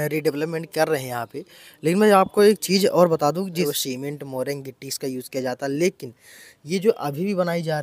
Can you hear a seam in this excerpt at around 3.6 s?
yes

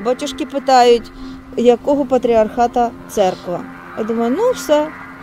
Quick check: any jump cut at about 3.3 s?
no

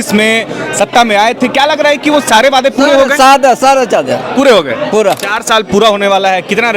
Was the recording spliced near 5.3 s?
yes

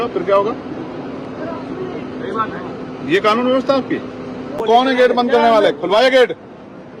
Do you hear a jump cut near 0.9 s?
no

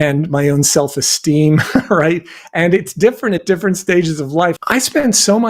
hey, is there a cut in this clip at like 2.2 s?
no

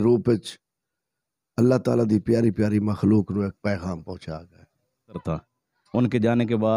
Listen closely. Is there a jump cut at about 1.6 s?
no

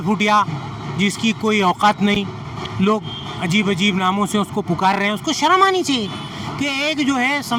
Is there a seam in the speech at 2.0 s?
no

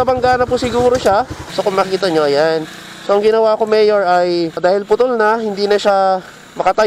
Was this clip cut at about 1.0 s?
no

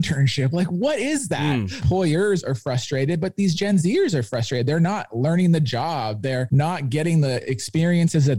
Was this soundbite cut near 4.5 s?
no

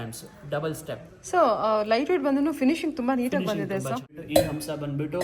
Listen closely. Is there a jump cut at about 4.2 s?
yes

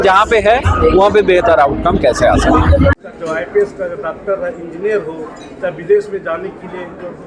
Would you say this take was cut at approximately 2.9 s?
yes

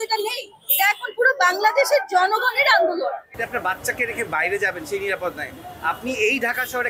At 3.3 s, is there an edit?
yes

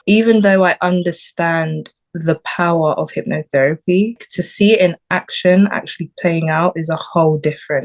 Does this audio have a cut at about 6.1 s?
no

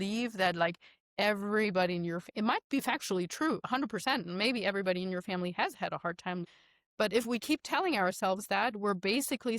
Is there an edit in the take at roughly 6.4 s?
yes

